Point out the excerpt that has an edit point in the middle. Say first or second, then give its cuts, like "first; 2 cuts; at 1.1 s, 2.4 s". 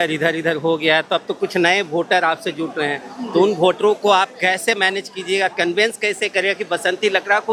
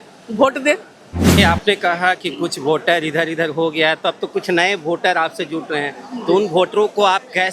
second; 1 cut; at 1.4 s